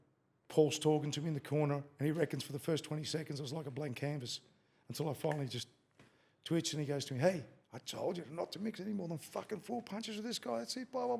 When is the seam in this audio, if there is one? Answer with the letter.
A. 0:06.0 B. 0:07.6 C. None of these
C